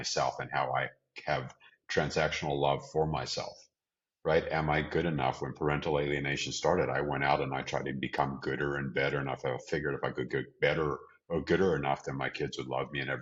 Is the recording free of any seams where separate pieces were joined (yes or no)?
yes